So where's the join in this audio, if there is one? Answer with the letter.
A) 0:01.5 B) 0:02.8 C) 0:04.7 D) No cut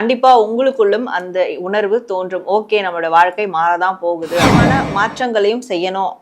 C